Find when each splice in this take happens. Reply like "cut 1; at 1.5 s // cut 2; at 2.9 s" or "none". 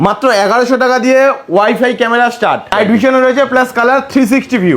cut 1; at 2.7 s